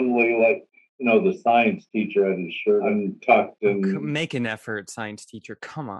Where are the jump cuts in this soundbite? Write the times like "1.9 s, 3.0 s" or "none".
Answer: 2.9 s, 4.0 s

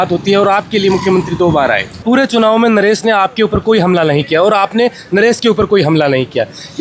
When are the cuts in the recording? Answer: 1.9 s

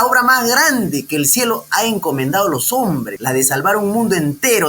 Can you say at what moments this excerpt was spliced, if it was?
3.1 s

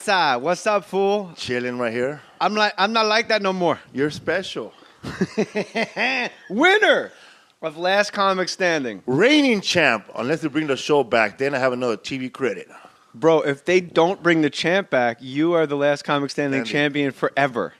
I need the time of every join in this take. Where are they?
1.4 s

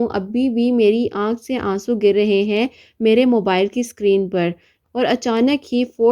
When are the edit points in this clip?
4.7 s

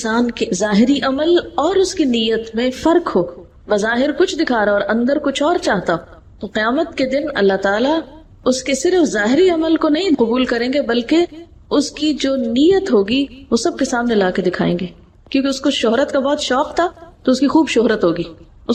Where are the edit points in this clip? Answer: none

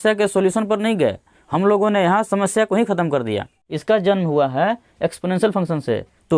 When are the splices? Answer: 3.6 s

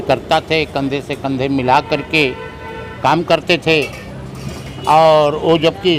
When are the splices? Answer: none

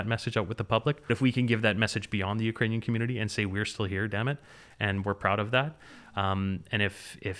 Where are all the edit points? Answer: 1.1 s

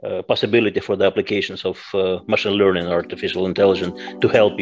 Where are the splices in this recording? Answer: none

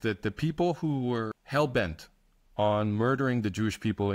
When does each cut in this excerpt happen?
1.4 s

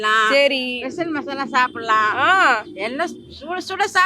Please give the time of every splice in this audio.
none

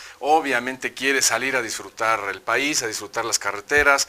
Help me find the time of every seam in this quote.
2.7 s

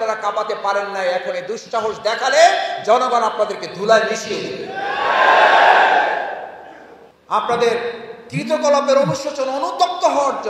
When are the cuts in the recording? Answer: 7.1 s

